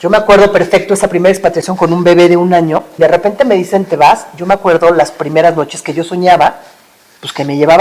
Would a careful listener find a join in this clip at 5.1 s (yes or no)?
no